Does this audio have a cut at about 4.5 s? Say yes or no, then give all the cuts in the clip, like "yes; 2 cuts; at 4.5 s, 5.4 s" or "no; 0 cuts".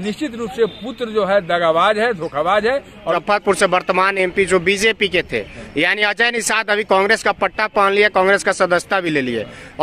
no; 1 cut; at 3.2 s